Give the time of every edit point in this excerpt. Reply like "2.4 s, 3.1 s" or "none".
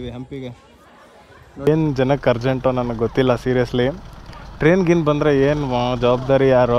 1.7 s